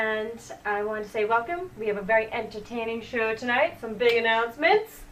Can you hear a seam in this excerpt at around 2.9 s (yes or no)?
no